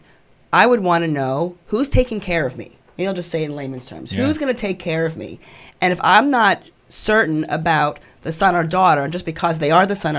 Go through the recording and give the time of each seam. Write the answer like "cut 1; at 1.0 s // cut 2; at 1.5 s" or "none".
cut 1; at 1.6 s